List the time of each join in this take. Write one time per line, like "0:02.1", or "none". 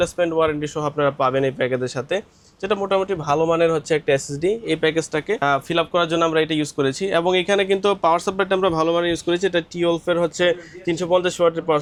none